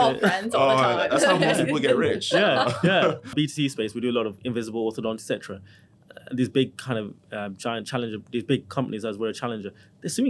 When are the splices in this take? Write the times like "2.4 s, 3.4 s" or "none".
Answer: 3.3 s